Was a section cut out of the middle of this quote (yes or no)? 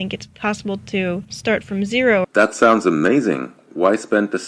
yes